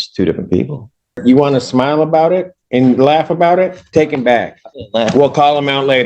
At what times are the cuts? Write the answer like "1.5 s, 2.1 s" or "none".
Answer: 1.2 s